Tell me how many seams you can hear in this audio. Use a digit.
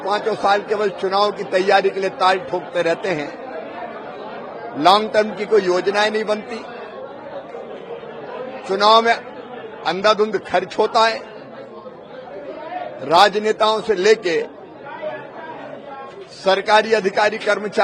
0